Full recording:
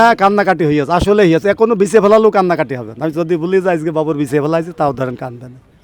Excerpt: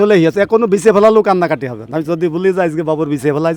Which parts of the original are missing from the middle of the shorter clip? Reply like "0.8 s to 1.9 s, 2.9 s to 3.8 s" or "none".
none